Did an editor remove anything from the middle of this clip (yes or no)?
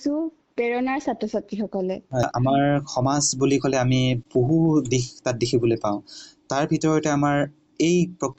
yes